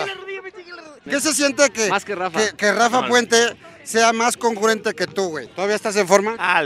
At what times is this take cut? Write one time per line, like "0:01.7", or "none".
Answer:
0:01.1
0:05.4